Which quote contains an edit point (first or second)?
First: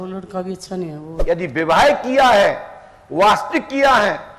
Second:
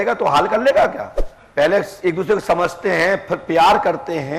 first